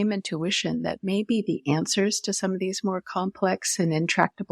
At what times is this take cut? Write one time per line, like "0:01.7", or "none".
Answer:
none